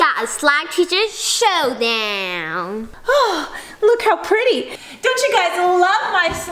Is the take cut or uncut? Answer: cut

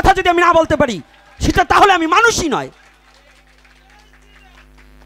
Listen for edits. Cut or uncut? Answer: uncut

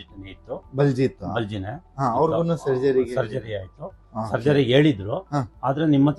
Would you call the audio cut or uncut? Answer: uncut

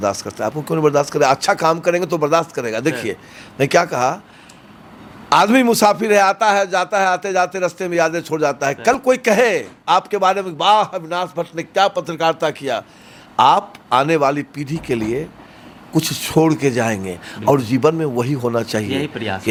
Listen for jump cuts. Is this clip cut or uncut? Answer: uncut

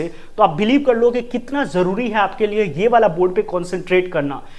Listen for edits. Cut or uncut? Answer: uncut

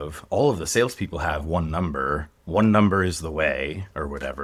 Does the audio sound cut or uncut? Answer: uncut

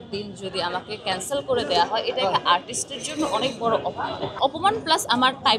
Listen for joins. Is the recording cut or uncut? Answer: cut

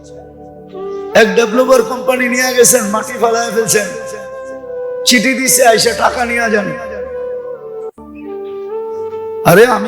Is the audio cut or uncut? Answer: cut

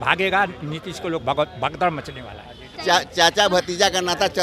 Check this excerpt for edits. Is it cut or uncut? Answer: cut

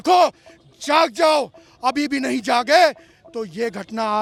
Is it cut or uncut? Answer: uncut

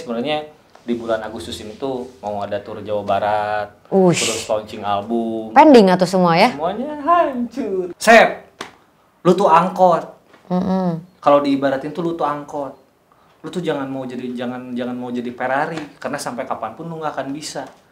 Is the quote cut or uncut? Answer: cut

